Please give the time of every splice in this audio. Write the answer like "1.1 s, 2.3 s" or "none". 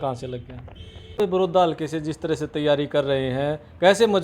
1.1 s